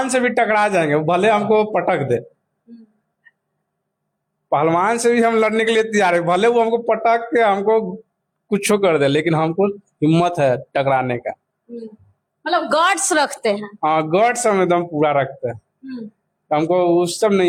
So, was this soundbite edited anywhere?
no; 0 cuts

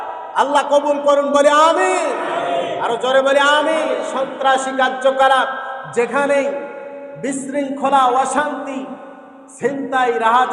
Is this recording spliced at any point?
yes; 1 cut; at 4.2 s

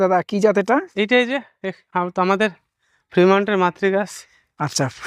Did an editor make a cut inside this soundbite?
no; 0 cuts

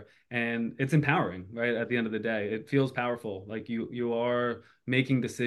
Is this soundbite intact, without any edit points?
yes; 0 cuts

